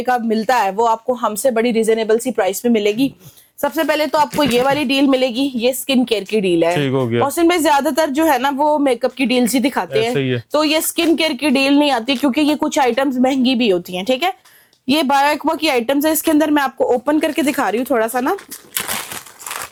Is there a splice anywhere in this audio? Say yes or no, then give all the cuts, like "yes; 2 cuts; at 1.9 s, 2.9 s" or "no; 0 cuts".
no; 0 cuts